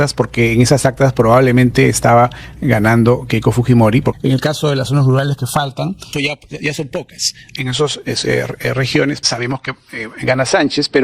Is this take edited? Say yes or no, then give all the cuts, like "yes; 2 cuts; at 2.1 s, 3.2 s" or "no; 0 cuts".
yes; 4 cuts; at 4.2 s, 6.0 s, 7.5 s, 9.2 s